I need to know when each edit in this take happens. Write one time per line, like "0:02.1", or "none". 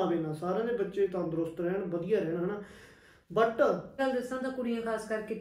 0:03.9